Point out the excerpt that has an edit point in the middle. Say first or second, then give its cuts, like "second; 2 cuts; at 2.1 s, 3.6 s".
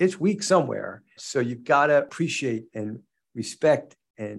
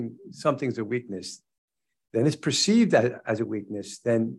first; 2 cuts; at 1.2 s, 2.1 s